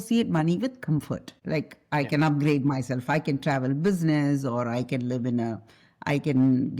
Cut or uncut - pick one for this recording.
cut